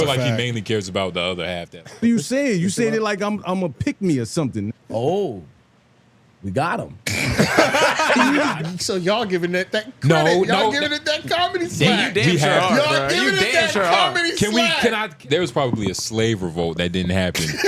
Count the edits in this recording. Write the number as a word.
three